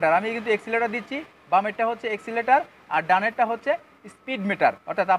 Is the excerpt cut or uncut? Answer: uncut